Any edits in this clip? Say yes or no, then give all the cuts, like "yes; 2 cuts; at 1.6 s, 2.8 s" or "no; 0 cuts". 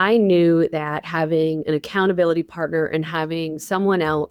no; 0 cuts